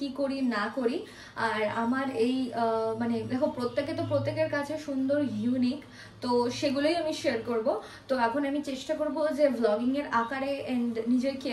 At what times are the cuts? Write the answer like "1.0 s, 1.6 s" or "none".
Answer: none